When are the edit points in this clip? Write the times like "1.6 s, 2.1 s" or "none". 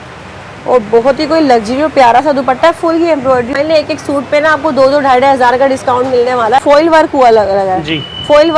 3.5 s, 6.6 s